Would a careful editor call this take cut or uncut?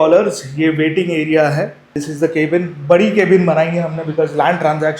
cut